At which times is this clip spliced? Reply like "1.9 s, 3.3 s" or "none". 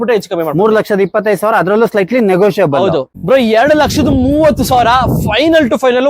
3.1 s

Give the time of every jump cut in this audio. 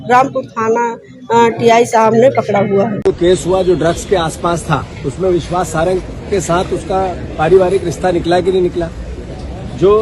3.0 s

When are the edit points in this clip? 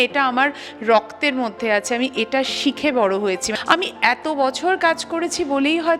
3.5 s

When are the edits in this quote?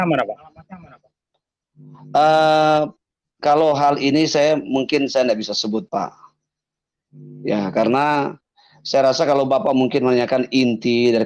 none

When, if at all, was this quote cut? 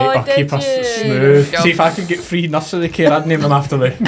1.5 s

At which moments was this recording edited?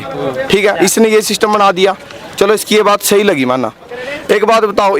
none

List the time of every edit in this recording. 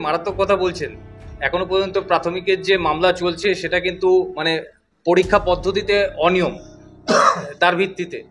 none

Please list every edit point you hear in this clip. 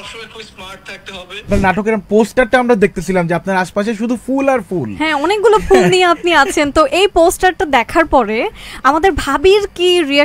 1.5 s

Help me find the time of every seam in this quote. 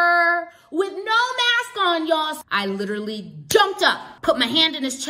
2.4 s, 4.1 s

